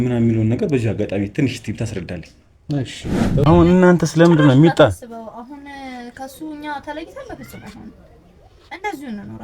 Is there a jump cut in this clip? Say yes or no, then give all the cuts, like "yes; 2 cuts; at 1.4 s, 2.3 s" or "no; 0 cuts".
yes; 1 cut; at 3.5 s